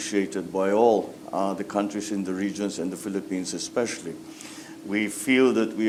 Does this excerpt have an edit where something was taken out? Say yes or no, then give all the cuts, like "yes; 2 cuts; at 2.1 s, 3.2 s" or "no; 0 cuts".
no; 0 cuts